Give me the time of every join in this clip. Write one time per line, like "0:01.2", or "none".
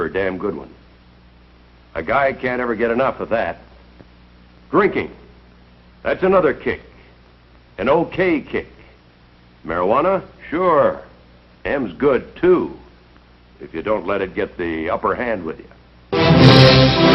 0:11.9